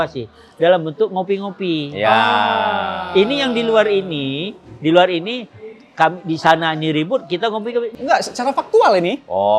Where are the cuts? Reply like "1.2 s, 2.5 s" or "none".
7.9 s